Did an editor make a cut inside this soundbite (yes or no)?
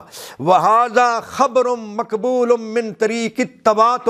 no